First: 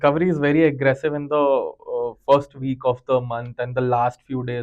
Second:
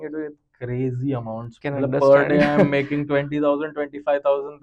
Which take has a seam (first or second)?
second